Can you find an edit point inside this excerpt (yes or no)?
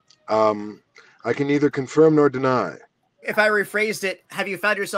yes